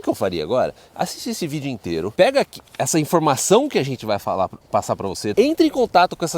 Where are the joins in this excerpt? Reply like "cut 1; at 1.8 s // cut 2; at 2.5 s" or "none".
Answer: cut 1; at 2.1 s // cut 2; at 5.3 s